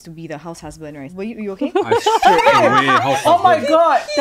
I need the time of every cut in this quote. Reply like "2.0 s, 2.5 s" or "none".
1.1 s